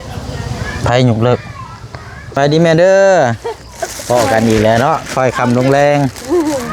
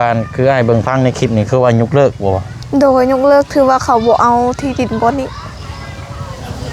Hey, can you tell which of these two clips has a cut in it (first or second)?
first